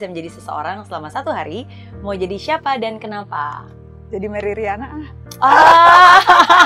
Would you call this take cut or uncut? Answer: uncut